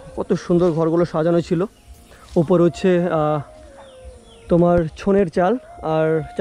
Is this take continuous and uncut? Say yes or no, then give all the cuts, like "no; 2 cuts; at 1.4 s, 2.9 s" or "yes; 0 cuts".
yes; 0 cuts